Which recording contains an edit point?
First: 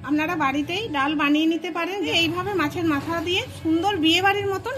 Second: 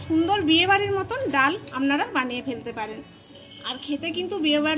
first; 1 cut; at 2.1 s

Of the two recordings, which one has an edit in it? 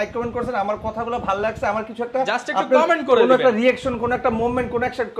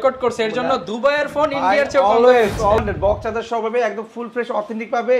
second; 1 cut; at 2.8 s

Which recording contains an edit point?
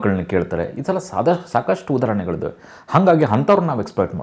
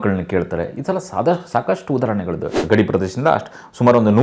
second; 1 cut; at 2.6 s

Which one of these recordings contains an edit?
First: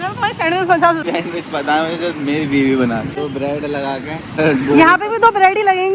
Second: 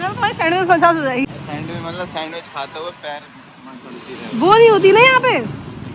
first; 3 cuts; at 1.0 s, 3.3 s, 4.4 s

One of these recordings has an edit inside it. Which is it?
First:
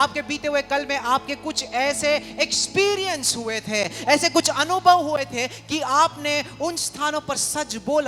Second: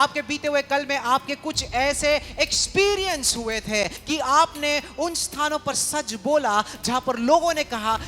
second; 1 cut; at 4.0 s

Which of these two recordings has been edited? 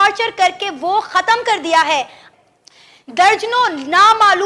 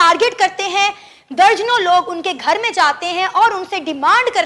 first; 1 cut; at 2.2 s

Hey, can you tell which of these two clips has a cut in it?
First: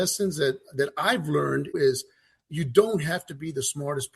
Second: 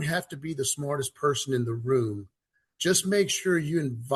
first; 1 cut; at 1.7 s

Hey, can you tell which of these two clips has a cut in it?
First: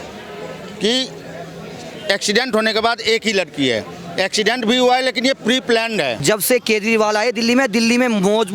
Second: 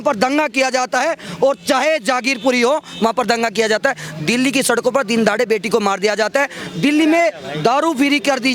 first; 1 cut; at 6.2 s

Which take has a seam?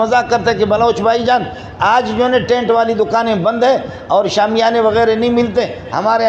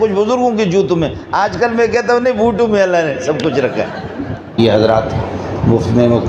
second; 1 cut; at 4.6 s

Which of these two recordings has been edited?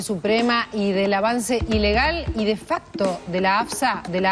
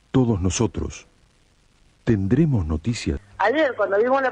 second; 1 cut; at 3.2 s

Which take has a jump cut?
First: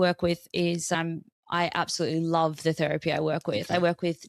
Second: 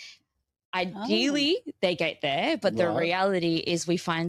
first; 1 cut; at 0.9 s

